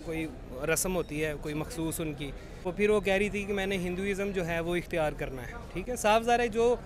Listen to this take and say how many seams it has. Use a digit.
1